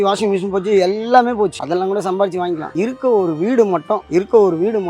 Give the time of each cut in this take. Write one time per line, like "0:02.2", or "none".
0:01.6
0:02.7
0:04.0